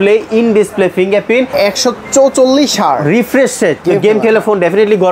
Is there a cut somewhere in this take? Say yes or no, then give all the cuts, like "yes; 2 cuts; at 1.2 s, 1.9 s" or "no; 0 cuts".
yes; 2 cuts; at 1.5 s, 3.8 s